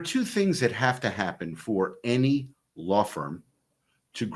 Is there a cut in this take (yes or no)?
no